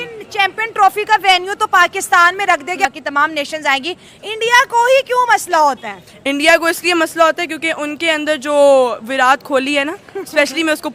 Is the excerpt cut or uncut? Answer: cut